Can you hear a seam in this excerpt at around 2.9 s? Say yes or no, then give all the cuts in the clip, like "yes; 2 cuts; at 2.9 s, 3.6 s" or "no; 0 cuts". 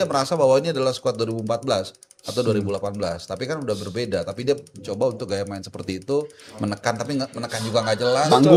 no; 0 cuts